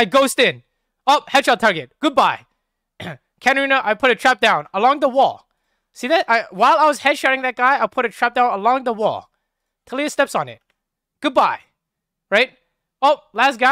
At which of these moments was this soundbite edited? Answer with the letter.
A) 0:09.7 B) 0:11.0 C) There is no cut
C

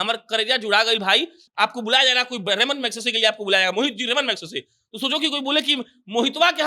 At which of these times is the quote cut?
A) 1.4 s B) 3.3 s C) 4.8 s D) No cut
A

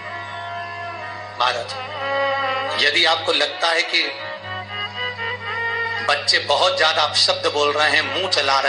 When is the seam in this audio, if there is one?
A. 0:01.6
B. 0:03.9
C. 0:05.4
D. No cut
D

